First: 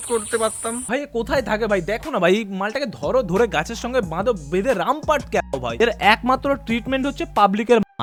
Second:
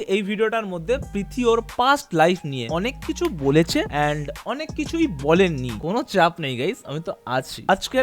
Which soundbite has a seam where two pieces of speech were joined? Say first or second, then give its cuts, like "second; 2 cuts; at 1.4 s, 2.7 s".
second; 2 cuts; at 2.6 s, 5.7 s